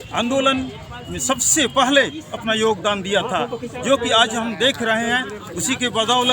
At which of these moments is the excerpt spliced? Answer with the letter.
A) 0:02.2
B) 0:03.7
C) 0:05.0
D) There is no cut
D